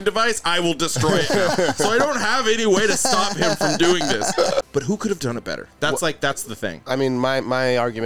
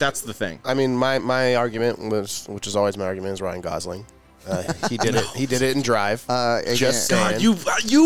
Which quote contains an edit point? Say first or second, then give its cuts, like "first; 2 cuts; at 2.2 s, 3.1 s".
first; 1 cut; at 4.6 s